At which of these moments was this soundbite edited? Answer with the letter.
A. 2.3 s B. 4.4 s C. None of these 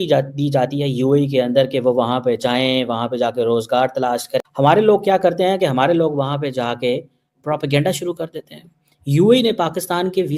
B